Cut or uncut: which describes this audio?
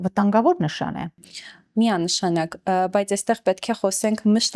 uncut